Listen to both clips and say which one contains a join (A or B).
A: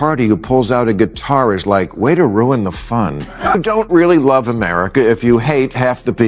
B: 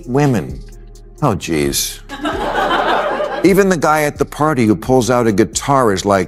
A